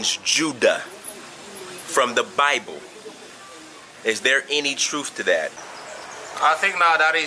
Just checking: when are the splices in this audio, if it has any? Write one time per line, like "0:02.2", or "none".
0:05.6